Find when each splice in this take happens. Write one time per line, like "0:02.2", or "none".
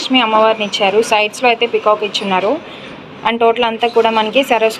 none

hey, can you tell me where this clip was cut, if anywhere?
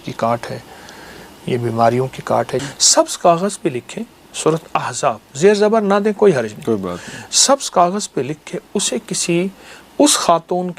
0:02.6

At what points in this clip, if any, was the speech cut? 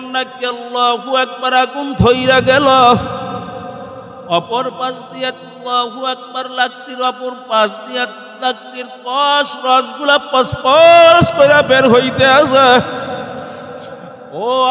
none

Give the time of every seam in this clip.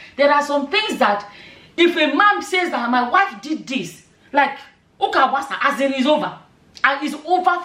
none

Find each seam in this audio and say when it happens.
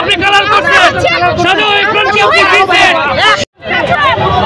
none

